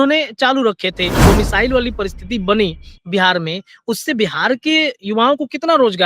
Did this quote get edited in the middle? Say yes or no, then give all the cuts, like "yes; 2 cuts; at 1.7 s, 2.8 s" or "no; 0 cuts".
yes; 1 cut; at 1.2 s